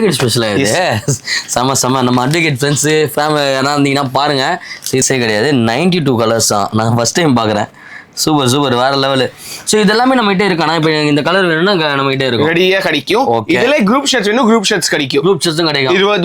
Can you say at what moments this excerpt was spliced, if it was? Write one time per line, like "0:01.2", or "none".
0:05.0